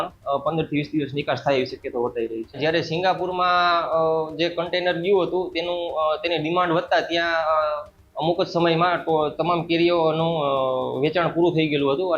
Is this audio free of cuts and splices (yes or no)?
no